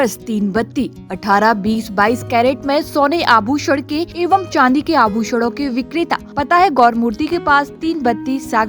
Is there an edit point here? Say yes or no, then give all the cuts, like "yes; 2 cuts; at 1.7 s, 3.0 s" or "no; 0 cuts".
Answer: yes; 2 cuts; at 4.1 s, 6.3 s